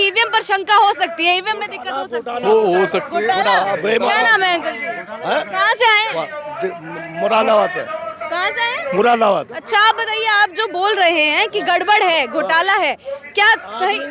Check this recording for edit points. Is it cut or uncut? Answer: uncut